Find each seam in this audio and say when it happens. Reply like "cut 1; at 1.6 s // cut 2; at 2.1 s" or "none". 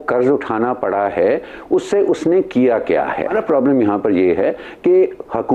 cut 1; at 3.3 s